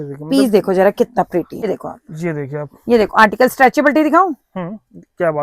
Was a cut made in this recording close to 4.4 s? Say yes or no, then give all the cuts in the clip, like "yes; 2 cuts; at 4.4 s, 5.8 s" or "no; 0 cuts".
no; 1 cut; at 1.5 s